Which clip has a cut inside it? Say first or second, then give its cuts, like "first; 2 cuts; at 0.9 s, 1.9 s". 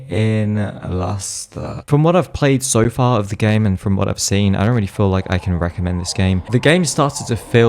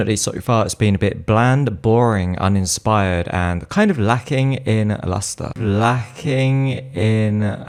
first; 2 cuts; at 1.8 s, 6.4 s